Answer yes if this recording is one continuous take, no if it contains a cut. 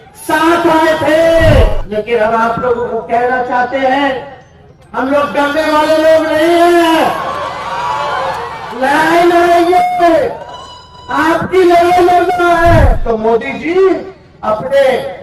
no